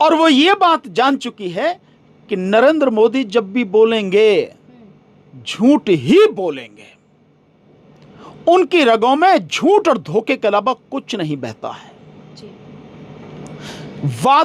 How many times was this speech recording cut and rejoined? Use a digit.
0